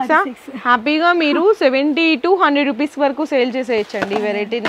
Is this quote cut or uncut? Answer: uncut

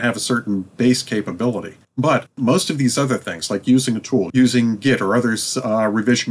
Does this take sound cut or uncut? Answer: cut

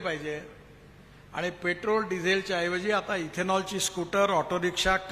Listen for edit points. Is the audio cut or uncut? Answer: uncut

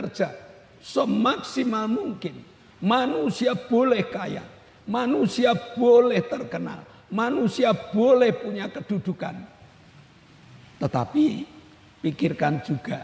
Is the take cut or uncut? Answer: uncut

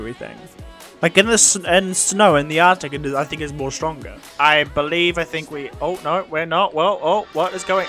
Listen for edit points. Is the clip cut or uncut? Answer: cut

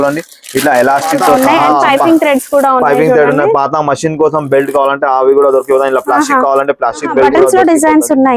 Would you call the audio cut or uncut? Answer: cut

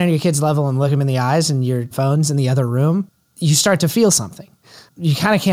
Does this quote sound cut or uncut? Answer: cut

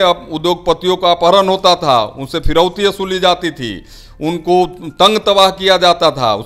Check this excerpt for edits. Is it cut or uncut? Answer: uncut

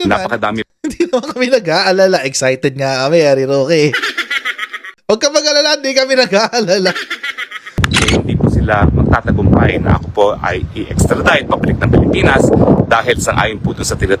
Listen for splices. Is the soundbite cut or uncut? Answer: cut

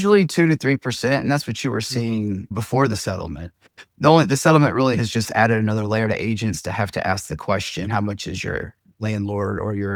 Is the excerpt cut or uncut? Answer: uncut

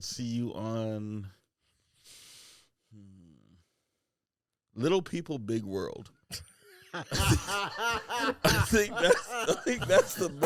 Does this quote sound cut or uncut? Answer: uncut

